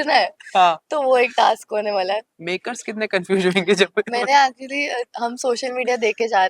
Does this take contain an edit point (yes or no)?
yes